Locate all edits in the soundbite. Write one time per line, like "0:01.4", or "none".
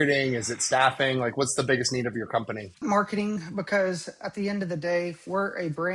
0:02.8